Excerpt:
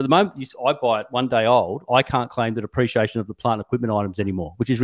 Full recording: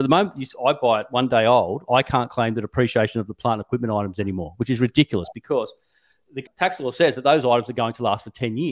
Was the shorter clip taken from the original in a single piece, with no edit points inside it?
yes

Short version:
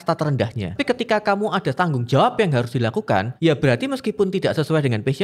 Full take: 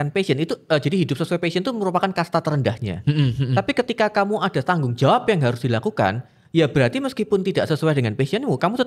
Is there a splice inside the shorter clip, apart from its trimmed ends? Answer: yes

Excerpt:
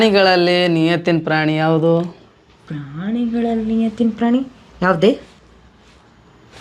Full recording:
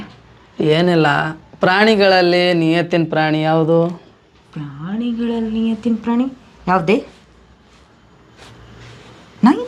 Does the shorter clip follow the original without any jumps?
yes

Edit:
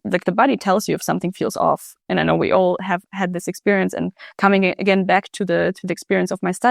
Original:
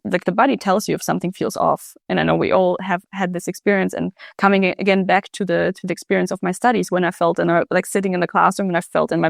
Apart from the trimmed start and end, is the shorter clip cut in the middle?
no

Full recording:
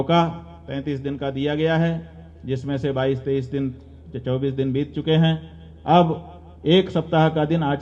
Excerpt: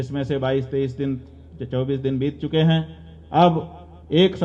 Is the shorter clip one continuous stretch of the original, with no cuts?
yes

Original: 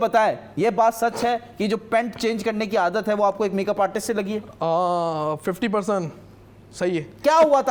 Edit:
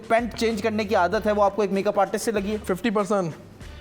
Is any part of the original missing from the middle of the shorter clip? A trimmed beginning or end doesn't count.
yes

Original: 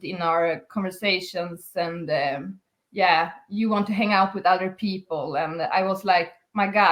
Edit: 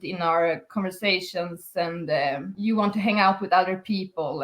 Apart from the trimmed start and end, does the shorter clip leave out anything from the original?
yes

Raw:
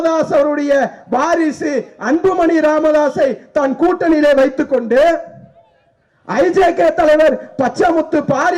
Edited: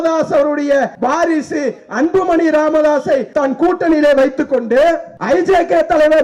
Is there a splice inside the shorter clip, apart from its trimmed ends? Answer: yes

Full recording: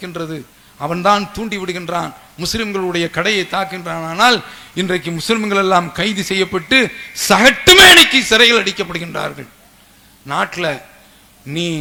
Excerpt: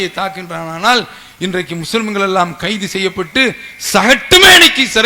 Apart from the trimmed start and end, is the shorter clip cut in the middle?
no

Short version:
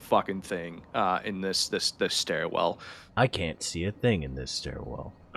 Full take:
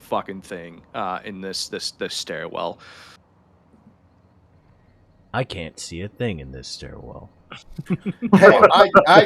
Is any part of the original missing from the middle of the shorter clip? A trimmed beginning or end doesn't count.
yes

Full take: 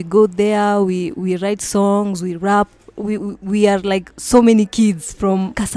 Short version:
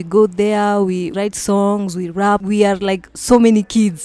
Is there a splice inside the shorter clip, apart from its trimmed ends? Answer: yes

